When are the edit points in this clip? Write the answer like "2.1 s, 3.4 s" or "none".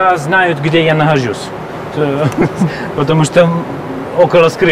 none